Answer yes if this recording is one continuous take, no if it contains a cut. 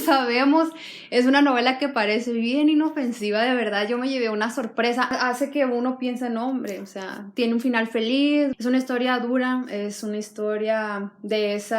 no